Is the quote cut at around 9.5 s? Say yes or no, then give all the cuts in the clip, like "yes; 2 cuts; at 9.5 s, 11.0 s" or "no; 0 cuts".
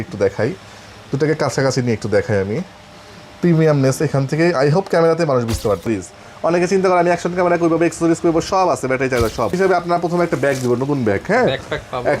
yes; 2 cuts; at 5.9 s, 9.5 s